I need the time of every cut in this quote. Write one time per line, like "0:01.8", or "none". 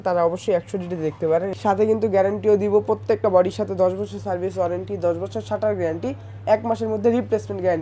0:01.6